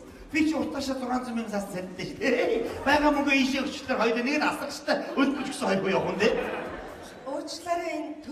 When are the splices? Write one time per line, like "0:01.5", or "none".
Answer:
none